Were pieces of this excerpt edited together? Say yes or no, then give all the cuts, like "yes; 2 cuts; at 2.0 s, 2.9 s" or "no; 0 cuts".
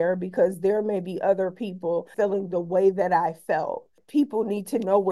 yes; 2 cuts; at 2.1 s, 4.0 s